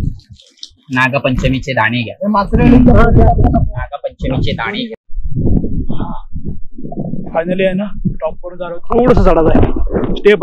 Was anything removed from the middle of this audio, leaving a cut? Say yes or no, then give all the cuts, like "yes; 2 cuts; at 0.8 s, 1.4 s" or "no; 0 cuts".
yes; 1 cut; at 4.9 s